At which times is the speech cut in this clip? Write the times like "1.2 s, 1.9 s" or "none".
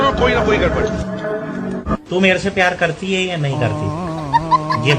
1.0 s